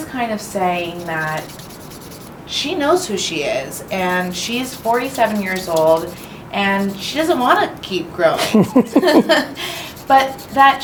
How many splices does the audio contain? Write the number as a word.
zero